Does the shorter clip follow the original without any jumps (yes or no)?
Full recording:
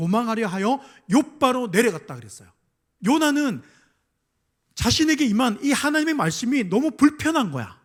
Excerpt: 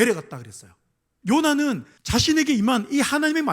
no